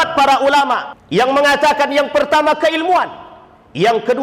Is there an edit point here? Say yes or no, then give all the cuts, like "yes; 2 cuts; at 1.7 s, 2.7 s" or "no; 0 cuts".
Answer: yes; 1 cut; at 0.9 s